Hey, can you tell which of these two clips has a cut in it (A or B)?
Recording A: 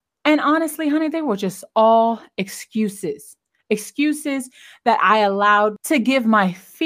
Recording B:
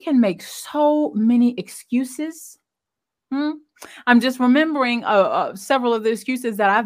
A